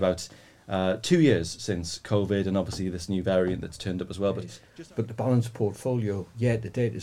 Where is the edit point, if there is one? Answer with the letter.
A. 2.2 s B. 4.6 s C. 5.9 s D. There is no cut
B